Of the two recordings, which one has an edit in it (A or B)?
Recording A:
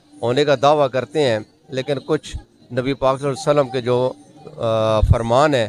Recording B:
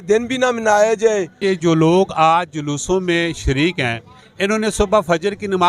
B